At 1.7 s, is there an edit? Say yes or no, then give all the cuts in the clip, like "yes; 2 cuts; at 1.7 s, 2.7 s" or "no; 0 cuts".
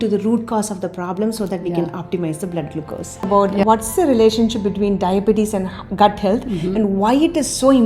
no; 1 cut; at 3.3 s